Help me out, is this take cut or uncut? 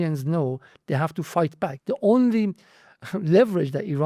cut